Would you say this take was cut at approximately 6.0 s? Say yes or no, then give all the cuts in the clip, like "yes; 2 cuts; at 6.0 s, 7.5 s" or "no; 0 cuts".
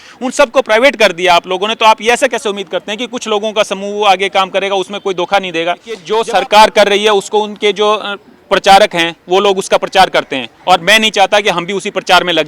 yes; 1 cut; at 6.0 s